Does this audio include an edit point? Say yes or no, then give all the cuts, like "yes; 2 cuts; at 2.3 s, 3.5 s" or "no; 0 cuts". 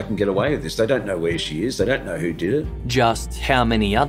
no; 0 cuts